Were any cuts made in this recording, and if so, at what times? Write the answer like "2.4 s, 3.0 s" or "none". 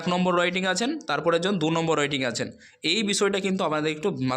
none

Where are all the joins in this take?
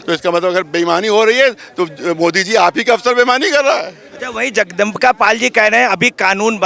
none

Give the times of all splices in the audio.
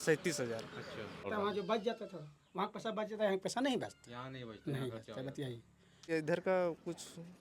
1.3 s, 6.0 s

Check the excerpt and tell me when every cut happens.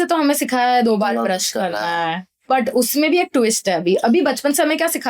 2.5 s

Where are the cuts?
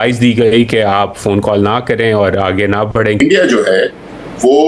3.2 s

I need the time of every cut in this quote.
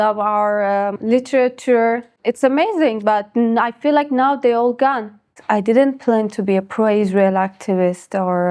1.0 s, 2.1 s, 5.3 s

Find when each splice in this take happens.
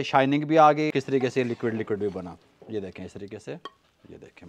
1.0 s

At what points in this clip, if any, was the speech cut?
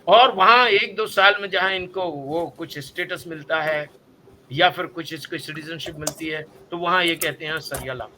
none

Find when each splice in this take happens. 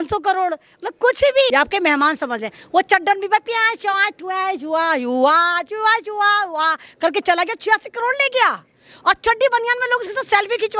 1.5 s

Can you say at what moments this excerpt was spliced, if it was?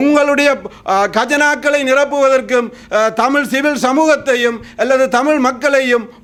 none

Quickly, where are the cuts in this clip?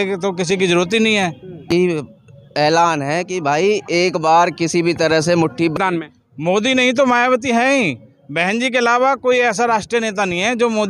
1.7 s, 5.7 s

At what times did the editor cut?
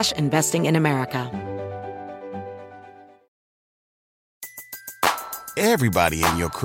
1.3 s

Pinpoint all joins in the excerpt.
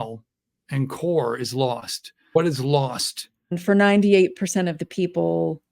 3.6 s

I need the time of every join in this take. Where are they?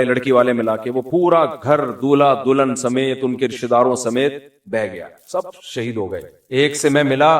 6.3 s

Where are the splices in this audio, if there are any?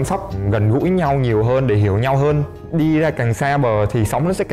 2.5 s

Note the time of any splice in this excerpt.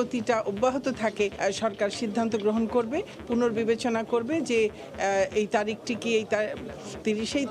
1.3 s

